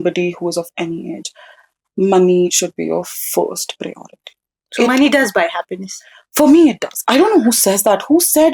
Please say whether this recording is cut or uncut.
uncut